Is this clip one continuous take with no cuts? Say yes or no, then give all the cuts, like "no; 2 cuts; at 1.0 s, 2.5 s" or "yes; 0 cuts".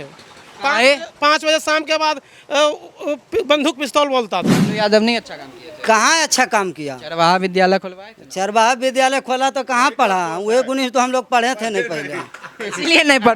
no; 1 cut; at 4.6 s